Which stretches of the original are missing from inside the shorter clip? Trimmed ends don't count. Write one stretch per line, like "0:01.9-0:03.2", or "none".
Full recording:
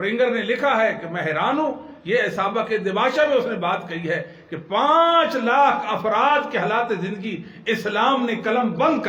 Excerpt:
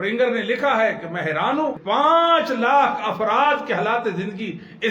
0:01.8-0:04.6